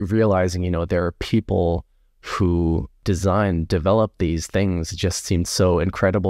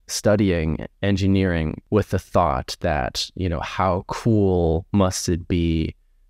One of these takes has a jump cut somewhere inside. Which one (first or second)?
second